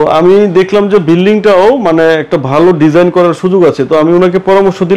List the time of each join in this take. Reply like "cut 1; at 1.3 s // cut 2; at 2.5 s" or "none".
none